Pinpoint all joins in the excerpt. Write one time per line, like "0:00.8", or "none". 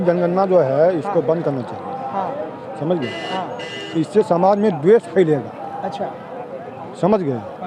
none